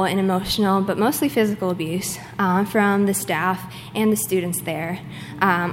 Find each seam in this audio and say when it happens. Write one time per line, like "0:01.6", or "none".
none